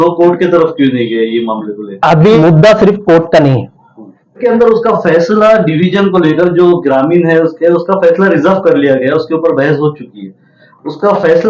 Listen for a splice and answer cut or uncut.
cut